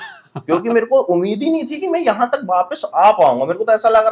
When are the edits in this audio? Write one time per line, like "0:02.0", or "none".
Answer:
none